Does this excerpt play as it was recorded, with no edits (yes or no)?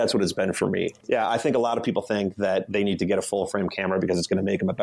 no